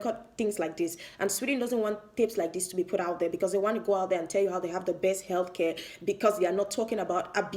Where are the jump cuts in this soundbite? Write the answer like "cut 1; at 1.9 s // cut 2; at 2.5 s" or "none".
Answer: none